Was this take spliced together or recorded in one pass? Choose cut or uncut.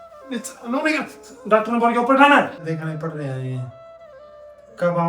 cut